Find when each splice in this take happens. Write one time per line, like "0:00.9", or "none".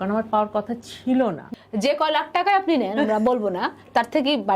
0:01.5